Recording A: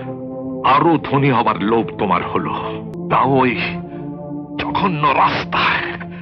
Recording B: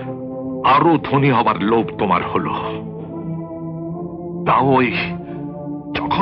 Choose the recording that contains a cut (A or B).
A